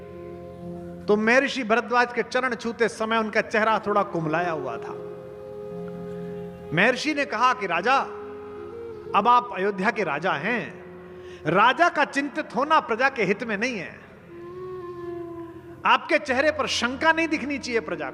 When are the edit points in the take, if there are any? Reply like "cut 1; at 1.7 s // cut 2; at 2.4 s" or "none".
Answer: none